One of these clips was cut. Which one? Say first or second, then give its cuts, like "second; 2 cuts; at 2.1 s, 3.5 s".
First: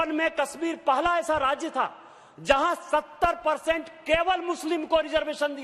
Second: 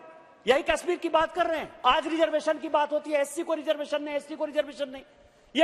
second; 1 cut; at 1.7 s